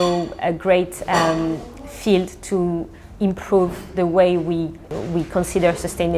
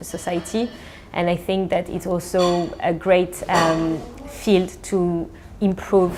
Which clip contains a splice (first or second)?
first